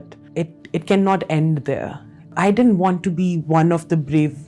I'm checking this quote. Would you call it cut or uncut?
cut